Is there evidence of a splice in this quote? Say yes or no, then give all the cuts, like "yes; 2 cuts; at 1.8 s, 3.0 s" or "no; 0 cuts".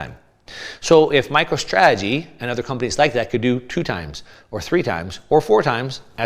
no; 0 cuts